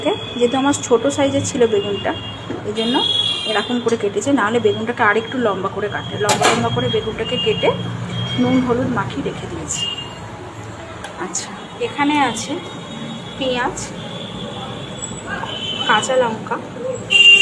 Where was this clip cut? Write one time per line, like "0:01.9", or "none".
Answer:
none